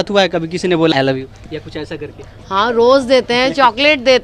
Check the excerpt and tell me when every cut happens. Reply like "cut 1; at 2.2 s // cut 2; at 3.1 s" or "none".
cut 1; at 0.9 s